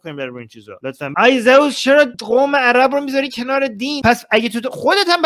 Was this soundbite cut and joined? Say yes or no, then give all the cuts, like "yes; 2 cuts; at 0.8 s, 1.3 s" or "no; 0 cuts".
yes; 3 cuts; at 1.1 s, 2.2 s, 4.0 s